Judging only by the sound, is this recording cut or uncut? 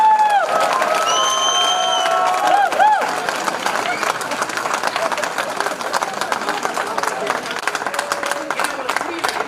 cut